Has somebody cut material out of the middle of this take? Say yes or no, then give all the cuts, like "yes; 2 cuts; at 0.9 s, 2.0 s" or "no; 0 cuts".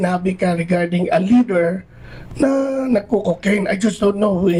no; 0 cuts